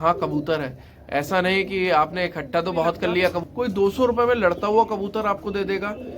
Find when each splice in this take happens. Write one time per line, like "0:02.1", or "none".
0:03.4

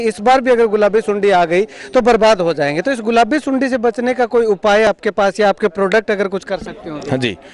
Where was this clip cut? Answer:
none

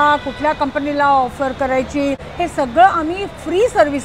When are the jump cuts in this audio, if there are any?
0:02.3

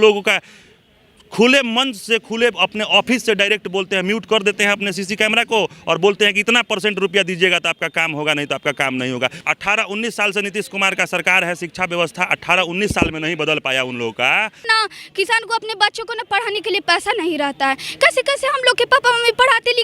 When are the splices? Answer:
0:09.4
0:14.6

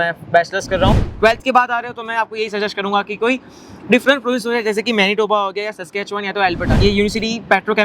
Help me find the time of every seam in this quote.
0:01.1
0:06.7

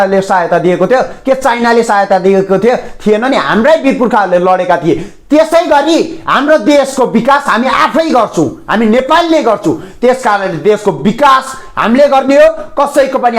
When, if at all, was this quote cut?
none

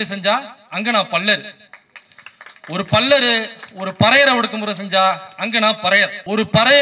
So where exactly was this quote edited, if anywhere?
none

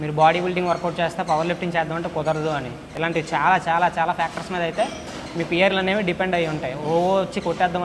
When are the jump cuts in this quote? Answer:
0:02.9

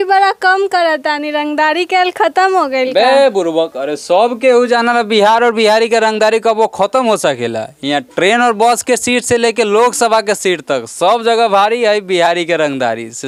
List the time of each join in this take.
none

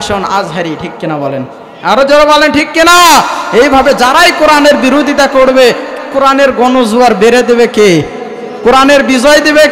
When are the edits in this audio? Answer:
none

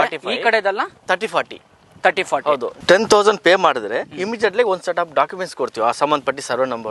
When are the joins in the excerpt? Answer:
0:02.7
0:06.0

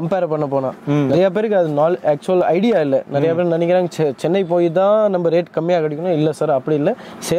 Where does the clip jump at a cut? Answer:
none

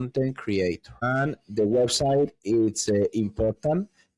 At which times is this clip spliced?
0:01.0

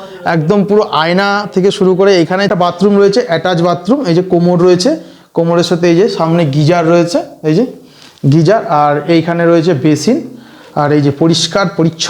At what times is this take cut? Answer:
0:02.5

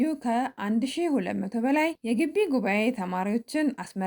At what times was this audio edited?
0:02.0

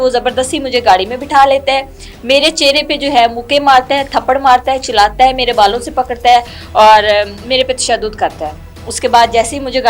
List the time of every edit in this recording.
none

